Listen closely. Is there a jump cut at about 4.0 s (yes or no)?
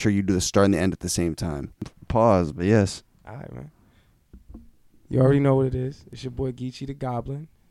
no